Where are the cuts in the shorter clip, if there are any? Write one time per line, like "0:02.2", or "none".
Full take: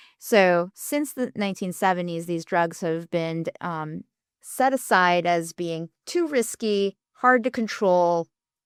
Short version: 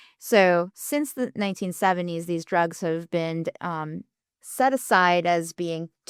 none